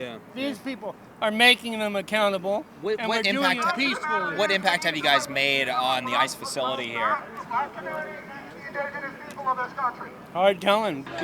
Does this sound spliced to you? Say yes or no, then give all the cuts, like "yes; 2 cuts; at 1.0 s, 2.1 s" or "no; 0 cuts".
no; 0 cuts